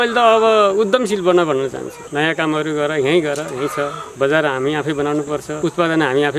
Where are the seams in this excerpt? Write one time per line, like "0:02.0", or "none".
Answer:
0:01.9
0:04.0
0:05.5